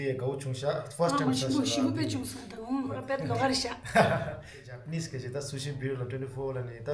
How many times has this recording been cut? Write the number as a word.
two